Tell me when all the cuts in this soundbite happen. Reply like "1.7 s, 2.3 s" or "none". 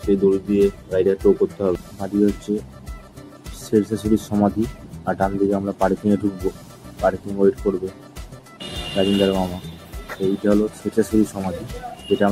1.9 s